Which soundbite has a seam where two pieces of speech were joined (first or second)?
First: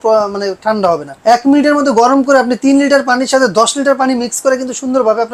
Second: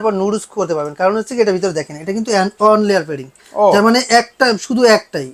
first